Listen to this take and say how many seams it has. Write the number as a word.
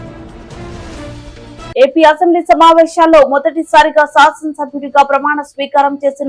one